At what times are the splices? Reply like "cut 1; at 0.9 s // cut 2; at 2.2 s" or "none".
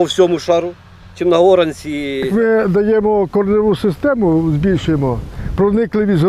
cut 1; at 2.3 s